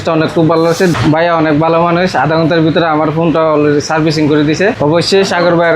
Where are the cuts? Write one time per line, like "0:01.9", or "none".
0:00.9
0:04.8